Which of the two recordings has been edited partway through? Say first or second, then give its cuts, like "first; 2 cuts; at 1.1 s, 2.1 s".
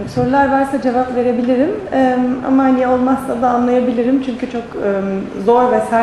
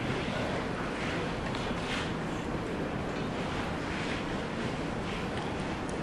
first; 1 cut; at 1.7 s